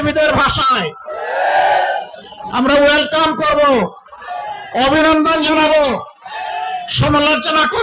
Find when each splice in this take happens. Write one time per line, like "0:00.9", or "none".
none